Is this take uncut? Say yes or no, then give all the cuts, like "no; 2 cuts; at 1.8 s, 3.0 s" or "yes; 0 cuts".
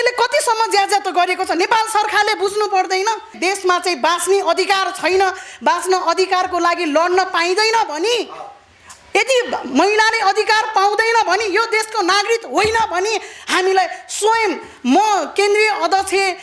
no; 1 cut; at 3.3 s